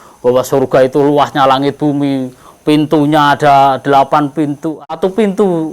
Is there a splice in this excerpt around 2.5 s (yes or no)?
no